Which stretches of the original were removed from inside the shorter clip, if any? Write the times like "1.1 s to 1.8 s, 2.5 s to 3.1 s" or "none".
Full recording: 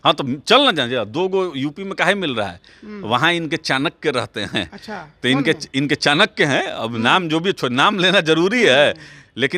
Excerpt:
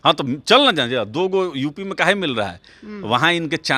none

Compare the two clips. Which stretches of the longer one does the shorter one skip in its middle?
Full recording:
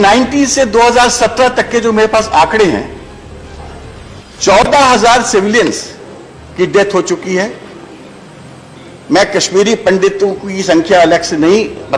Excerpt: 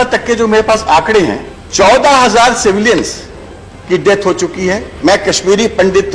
3.4 s to 4.7 s, 7.6 s to 9.0 s

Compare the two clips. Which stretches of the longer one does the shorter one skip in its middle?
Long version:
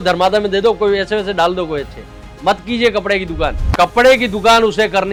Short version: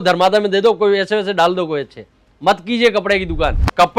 none

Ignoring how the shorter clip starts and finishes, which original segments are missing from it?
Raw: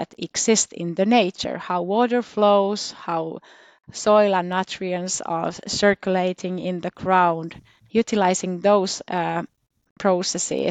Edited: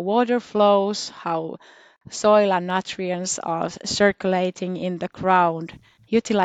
none

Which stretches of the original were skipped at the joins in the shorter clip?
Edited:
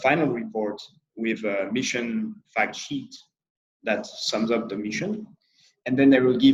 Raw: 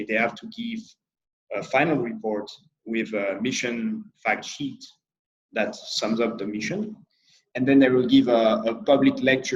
none

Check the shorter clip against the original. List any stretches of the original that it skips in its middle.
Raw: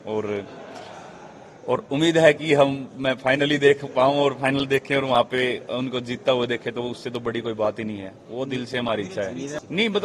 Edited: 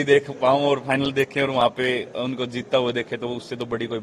none

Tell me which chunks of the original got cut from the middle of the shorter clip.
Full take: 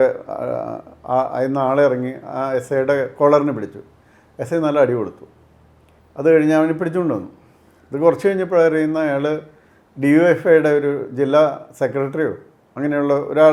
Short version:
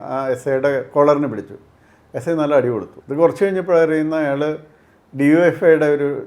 5.2 s to 7.8 s

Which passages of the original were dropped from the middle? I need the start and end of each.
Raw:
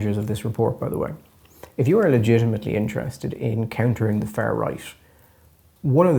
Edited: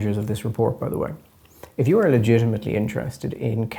none

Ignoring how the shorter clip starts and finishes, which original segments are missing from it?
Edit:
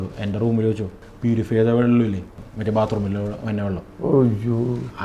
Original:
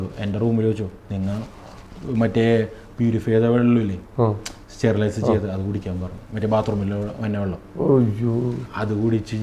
1.0 s to 2.8 s, 4.0 s to 6.0 s

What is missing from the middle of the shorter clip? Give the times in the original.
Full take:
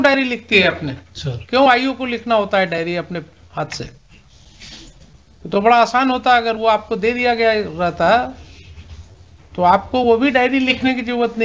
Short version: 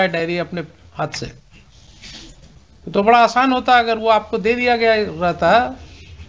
none

